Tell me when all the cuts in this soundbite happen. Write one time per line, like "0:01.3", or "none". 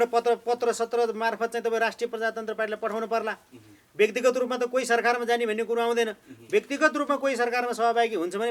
none